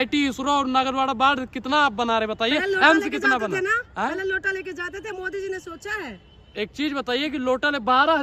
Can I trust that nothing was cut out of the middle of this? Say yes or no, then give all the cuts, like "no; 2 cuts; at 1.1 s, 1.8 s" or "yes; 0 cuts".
yes; 0 cuts